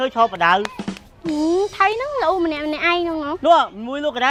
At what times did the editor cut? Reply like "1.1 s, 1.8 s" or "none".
none

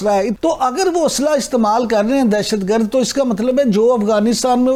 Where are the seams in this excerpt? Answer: none

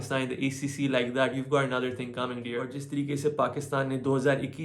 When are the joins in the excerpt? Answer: 2.8 s

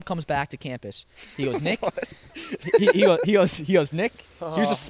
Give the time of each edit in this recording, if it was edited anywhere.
none

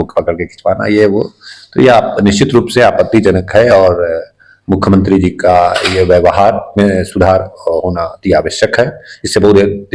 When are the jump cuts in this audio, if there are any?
none

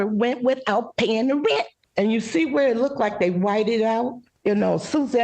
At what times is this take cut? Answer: 1.8 s, 4.2 s

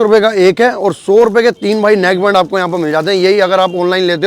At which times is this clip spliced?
none

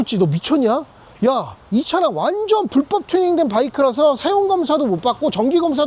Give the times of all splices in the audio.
none

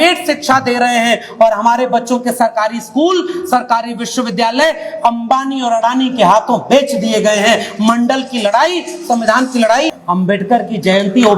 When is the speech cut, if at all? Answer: 10.0 s

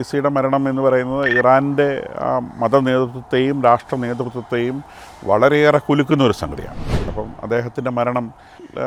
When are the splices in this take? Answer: none

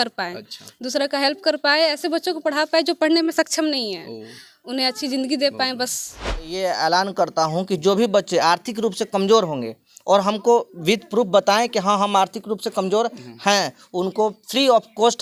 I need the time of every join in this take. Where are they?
6.5 s

